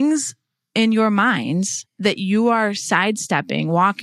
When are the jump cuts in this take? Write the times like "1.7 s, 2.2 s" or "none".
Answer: 1.8 s

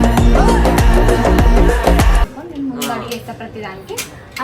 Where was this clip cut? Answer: 2.2 s

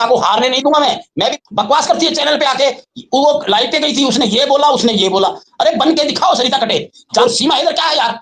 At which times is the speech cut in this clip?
1.4 s, 7.2 s

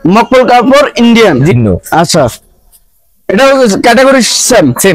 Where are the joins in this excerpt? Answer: 1.5 s

